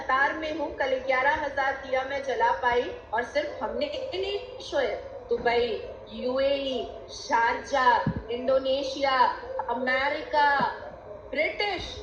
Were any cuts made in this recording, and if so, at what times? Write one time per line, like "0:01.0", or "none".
none